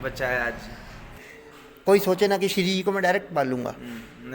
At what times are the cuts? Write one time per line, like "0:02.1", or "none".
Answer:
0:01.1